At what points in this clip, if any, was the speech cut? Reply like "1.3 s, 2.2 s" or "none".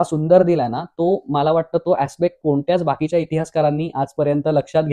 none